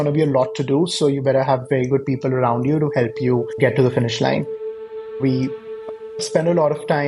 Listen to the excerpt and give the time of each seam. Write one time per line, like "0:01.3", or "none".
none